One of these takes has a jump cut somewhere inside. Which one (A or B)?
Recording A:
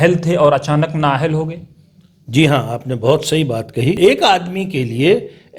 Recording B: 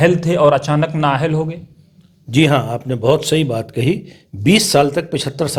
A